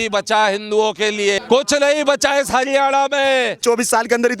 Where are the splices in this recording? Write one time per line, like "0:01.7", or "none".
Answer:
0:01.4
0:03.6